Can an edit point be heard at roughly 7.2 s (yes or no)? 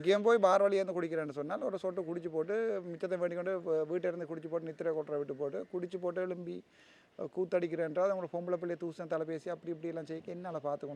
no